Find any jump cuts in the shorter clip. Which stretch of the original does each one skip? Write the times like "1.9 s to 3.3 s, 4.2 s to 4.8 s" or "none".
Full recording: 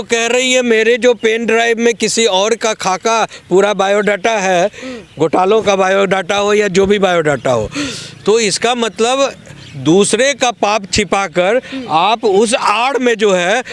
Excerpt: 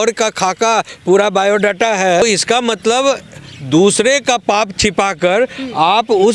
4.6 s to 8.3 s